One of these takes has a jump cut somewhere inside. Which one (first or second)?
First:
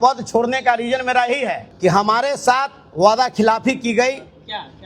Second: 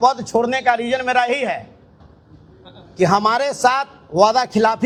first